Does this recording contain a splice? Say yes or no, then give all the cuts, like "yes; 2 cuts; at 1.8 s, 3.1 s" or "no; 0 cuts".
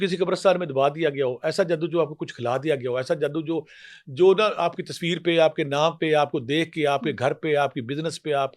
no; 0 cuts